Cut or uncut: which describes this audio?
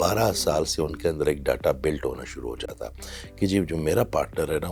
uncut